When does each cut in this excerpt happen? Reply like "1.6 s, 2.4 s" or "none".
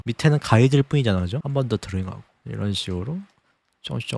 none